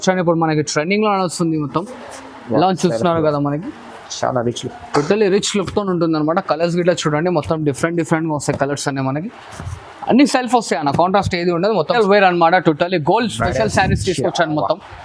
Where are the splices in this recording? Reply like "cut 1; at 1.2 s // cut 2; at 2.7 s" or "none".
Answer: cut 1; at 11.9 s